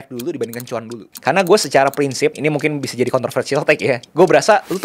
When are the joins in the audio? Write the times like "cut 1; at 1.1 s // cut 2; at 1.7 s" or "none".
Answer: cut 1; at 1.0 s // cut 2; at 2.4 s